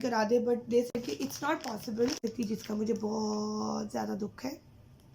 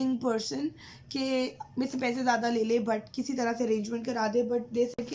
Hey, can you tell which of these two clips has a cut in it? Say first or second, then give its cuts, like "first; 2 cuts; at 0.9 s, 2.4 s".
first; 1 cut; at 2.2 s